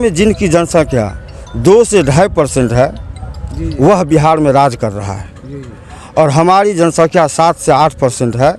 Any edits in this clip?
no; 0 cuts

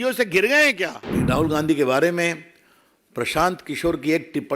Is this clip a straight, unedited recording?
no; 1 cut; at 1.0 s

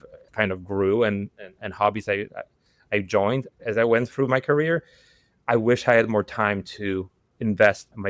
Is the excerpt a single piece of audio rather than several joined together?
no; 1 cut; at 3.5 s

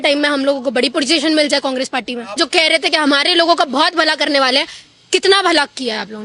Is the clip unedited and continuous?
no; 1 cut; at 2.4 s

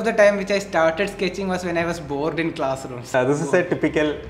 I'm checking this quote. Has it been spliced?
yes; 1 cut; at 3.1 s

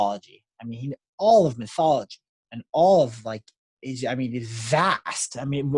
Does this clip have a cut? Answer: no; 0 cuts

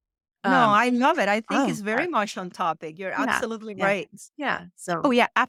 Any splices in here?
no; 0 cuts

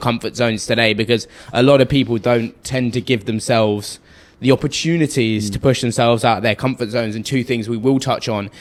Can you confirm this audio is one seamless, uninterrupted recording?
yes; 0 cuts

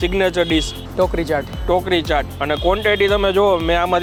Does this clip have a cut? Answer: no; 0 cuts

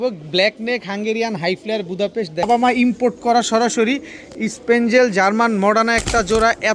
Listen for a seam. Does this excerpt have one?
yes; 1 cut; at 2.4 s

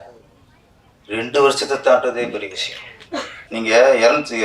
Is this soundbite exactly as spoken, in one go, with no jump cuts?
no; 1 cut; at 3.4 s

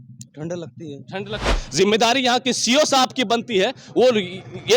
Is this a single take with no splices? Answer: no; 1 cut; at 1.5 s

